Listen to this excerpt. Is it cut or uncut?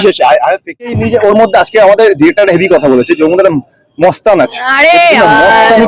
cut